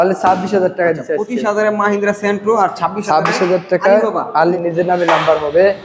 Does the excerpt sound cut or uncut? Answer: cut